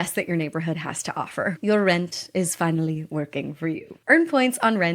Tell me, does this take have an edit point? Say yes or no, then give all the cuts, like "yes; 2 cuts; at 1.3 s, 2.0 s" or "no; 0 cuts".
yes; 1 cut; at 1.6 s